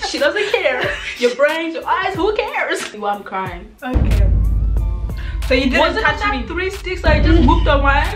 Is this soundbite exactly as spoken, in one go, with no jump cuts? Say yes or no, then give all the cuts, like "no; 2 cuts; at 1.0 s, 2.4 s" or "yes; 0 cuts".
no; 1 cut; at 3.0 s